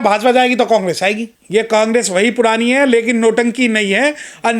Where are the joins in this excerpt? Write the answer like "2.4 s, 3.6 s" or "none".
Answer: 1.3 s